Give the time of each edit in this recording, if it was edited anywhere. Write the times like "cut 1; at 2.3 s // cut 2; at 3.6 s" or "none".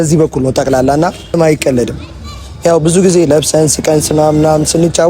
cut 1; at 1.4 s